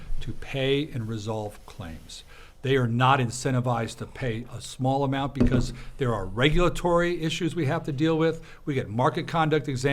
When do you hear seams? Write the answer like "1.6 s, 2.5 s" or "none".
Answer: none

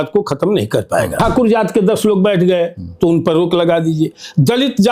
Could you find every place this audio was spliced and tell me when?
1.1 s

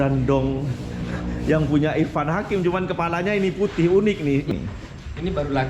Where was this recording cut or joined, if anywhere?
4.5 s

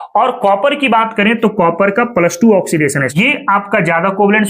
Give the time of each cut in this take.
3.2 s

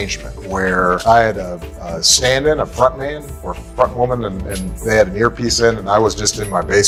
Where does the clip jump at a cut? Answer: none

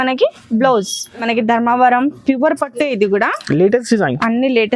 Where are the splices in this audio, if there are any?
1.3 s

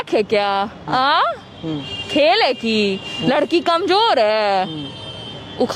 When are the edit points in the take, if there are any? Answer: none

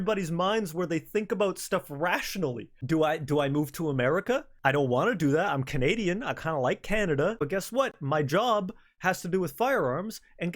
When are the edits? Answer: 2.7 s, 4.5 s, 7.4 s

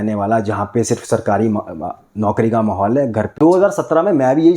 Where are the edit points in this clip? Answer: 3.3 s

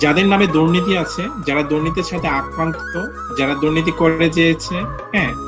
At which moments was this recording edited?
none

